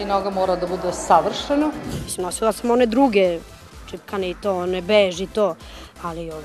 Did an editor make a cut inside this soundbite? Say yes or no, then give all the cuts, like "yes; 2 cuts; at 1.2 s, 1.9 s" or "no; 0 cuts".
yes; 1 cut; at 1.9 s